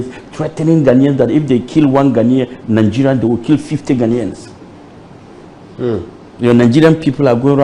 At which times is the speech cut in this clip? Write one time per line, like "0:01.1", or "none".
none